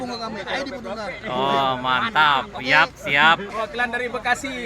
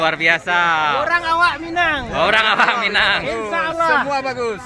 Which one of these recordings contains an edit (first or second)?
first